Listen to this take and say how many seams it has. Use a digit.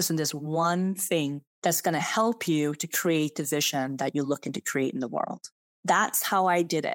2